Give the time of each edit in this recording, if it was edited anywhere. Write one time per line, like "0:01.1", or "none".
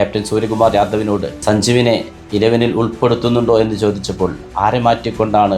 0:01.3